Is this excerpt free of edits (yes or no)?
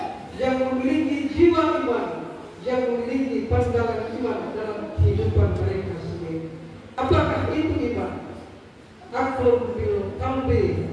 no